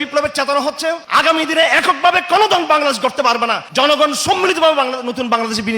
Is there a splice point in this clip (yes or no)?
yes